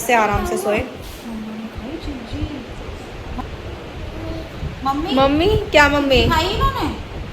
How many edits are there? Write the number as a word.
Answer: one